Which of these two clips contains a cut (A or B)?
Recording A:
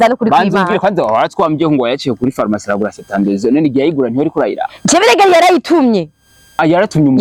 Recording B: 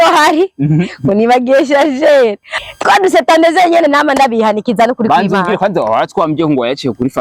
B